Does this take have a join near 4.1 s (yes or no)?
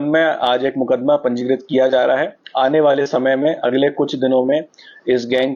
no